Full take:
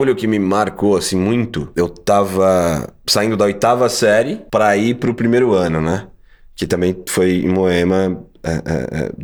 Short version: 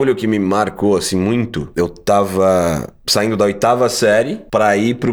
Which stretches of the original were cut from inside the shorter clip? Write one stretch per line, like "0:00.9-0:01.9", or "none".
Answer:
none